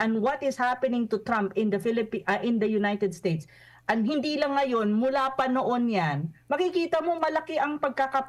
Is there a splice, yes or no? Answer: no